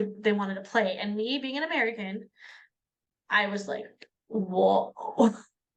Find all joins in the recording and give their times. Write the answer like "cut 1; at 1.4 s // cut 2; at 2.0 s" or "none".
none